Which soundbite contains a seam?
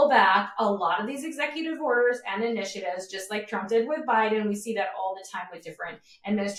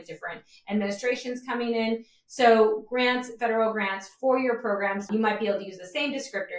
second; 1 cut; at 5.1 s

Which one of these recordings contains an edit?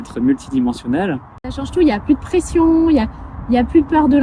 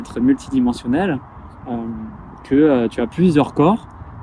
first; 1 cut; at 1.6 s

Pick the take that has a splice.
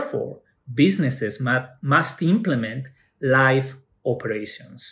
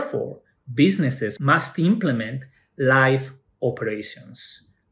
second; 1 cut; at 1.3 s

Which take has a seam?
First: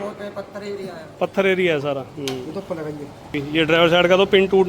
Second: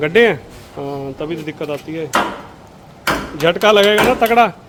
first; 1 cut; at 3.4 s

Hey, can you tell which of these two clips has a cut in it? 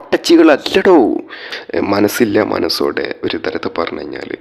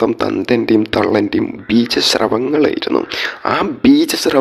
first; 1 cut; at 1.5 s

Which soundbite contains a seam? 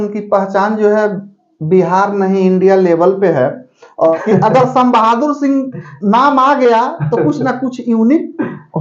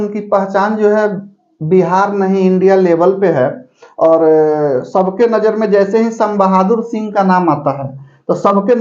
first; 1 cut; at 4.2 s

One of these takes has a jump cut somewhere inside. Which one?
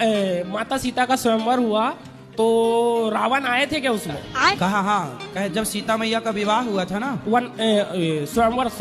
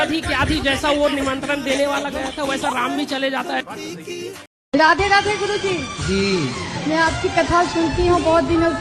second; 1 cut; at 4.4 s

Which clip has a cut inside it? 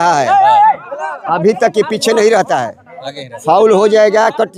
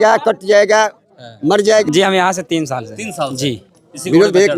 second; 1 cut; at 1.8 s

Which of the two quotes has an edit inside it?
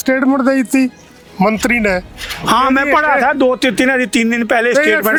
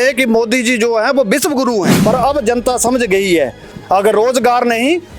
second; 1 cut; at 1.9 s

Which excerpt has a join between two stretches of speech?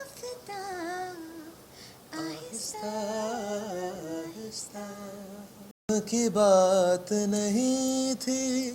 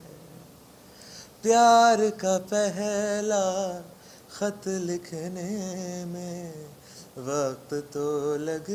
first; 1 cut; at 5.9 s

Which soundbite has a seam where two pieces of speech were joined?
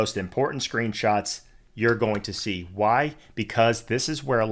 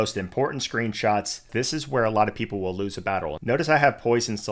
second; 2 cuts; at 1.5 s, 3.3 s

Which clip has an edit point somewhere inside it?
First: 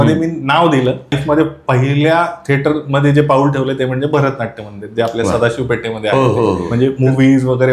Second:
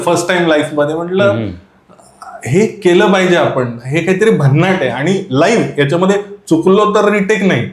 first; 2 cuts; at 1.2 s, 6.7 s

